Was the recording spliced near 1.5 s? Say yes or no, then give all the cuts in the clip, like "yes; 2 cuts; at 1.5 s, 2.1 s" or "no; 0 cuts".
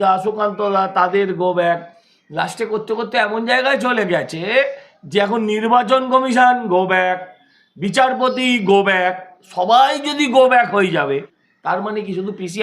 no; 1 cut; at 11.4 s